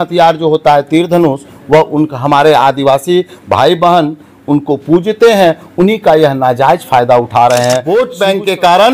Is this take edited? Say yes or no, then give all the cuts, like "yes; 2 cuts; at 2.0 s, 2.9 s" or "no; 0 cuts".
yes; 1 cut; at 7.8 s